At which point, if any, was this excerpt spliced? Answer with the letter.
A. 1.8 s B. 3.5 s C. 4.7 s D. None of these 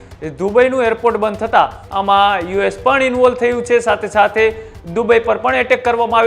A